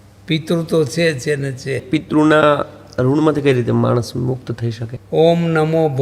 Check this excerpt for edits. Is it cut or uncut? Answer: cut